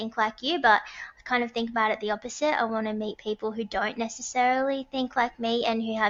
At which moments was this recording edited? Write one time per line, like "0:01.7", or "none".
none